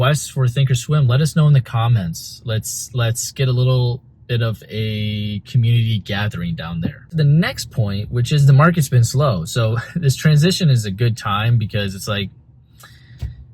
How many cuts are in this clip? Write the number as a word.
one